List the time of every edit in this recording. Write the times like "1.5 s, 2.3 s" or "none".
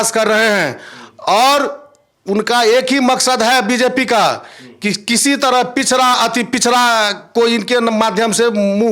none